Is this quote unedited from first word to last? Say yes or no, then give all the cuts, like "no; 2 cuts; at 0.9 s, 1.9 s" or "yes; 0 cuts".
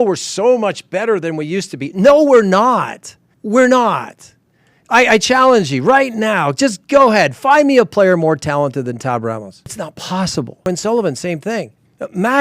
no; 2 cuts; at 9.7 s, 10.6 s